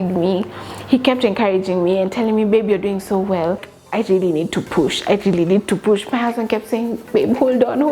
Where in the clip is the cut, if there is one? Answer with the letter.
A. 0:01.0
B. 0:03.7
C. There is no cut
B